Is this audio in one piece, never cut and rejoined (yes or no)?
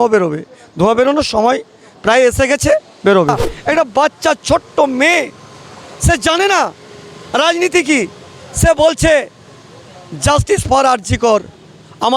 no